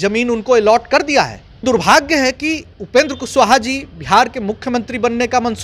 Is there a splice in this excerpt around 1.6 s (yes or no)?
yes